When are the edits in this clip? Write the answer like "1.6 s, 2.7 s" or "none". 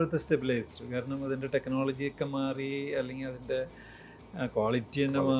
none